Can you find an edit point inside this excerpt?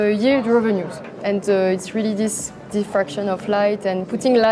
yes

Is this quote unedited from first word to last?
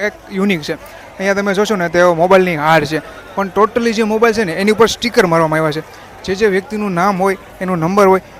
yes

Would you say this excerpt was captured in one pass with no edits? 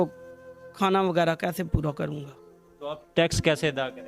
yes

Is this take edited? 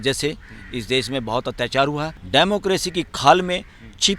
yes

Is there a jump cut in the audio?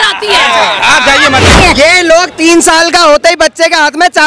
yes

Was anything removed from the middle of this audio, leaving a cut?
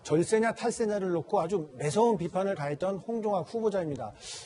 yes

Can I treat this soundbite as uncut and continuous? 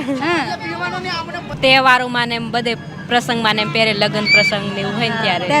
no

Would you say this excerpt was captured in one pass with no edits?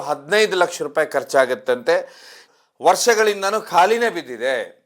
no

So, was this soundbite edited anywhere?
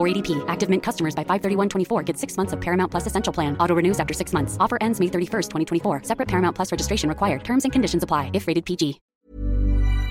yes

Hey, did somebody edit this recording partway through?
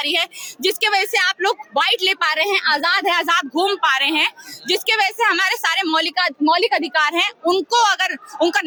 no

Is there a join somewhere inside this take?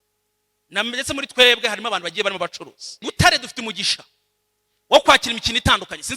yes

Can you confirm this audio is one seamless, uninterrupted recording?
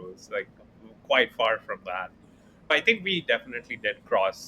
no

